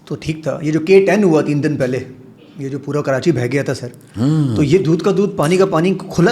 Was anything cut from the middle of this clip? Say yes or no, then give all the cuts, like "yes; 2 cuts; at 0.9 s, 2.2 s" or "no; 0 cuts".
no; 0 cuts